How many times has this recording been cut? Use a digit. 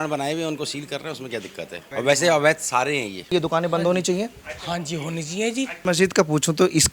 3